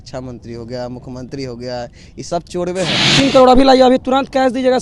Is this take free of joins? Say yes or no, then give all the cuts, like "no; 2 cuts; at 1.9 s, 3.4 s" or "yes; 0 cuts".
no; 1 cut; at 3.1 s